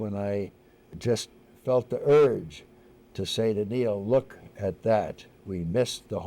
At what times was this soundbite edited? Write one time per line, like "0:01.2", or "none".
0:00.9